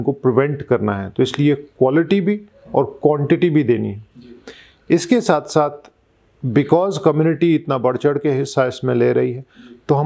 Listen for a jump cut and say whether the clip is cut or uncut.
uncut